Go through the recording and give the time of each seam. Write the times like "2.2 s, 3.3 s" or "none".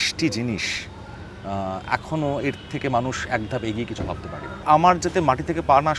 4.6 s